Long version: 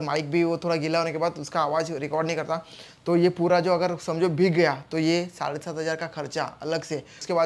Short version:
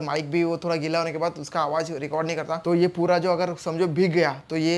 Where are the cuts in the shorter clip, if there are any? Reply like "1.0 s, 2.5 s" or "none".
2.6 s